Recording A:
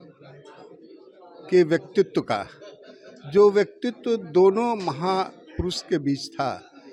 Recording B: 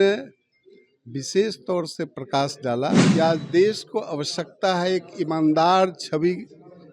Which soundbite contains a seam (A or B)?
B